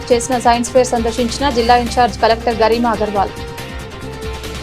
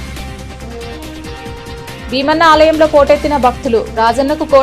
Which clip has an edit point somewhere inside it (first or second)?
second